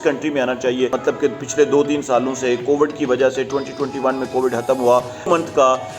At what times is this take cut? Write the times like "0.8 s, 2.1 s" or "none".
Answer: 1.0 s, 5.3 s